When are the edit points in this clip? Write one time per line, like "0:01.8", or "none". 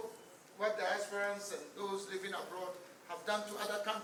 none